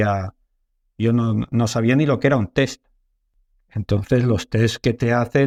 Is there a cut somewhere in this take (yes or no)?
no